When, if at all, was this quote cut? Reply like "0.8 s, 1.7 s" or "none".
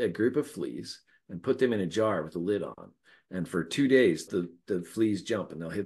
4.3 s